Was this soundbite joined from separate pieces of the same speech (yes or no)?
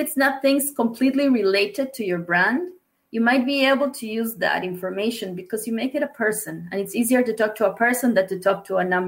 no